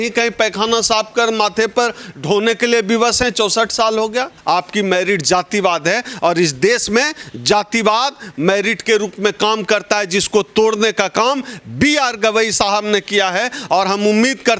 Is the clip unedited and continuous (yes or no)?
no